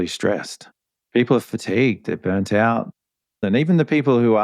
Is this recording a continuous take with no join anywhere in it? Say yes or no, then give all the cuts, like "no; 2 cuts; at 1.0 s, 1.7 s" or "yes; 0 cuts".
no; 1 cut; at 3.4 s